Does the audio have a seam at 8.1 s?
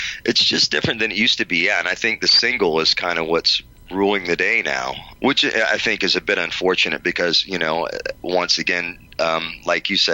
no; 1 cut; at 5.0 s

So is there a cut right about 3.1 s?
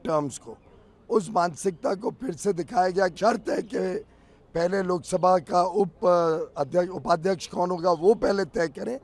yes; 1 cut; at 3.1 s

